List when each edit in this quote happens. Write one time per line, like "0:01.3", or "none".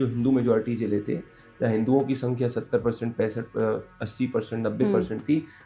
none

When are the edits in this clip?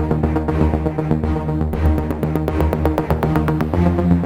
0:03.0

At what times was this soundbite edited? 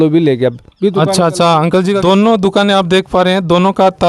0:02.0

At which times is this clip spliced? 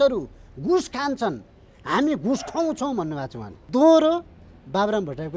0:03.6

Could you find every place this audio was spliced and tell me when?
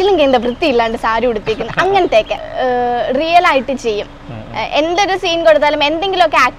0:02.4

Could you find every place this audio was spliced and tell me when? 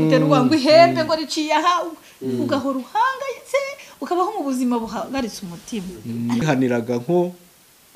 0:06.4

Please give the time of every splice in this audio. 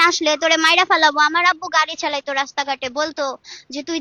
none

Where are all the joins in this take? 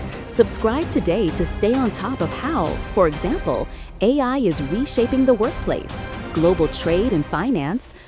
none

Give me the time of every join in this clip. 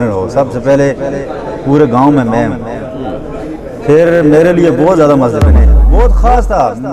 0:05.9

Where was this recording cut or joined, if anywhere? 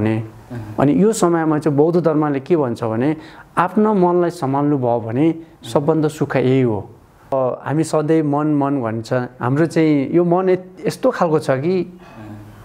0:07.3

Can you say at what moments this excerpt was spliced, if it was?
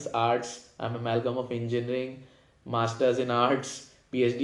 none

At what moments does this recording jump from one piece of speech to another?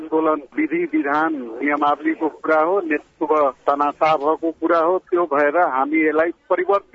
none

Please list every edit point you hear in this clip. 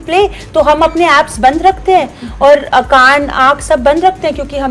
none

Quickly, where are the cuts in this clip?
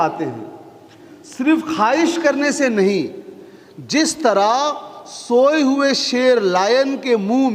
none

